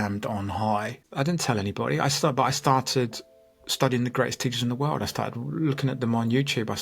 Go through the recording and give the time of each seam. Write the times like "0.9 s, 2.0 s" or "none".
1.0 s